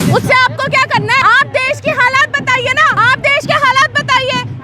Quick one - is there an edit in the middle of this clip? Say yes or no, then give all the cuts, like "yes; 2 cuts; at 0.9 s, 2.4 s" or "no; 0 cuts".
yes; 2 cuts; at 1.2 s, 2.9 s